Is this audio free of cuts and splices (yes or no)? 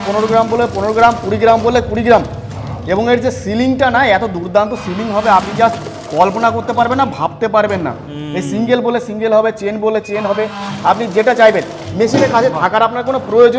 yes